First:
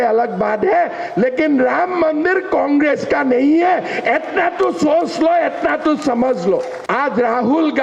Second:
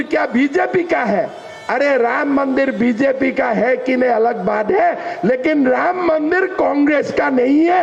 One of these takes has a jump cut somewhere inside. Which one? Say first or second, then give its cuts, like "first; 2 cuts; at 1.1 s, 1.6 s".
first; 1 cut; at 6.8 s